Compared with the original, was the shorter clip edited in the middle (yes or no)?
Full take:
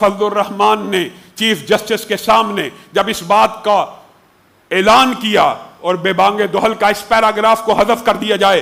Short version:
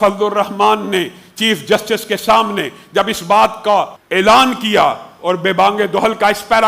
yes